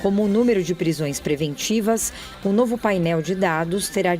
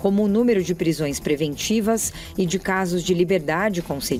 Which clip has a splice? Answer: first; 1 cut; at 2.3 s

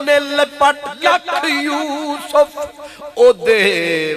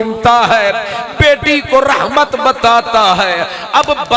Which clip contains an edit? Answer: first; 1 cut; at 0.9 s

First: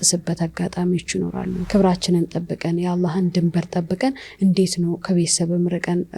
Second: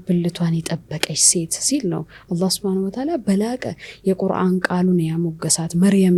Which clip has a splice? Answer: first; 1 cut; at 1.6 s

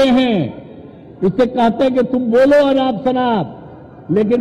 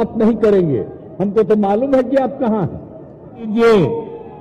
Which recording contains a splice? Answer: second; 1 cut; at 3.5 s

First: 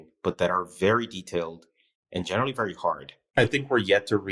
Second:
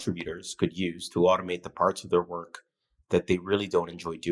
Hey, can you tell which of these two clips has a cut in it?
first; 1 cut; at 3.1 s

